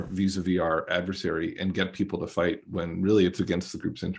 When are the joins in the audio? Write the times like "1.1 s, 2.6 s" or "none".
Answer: none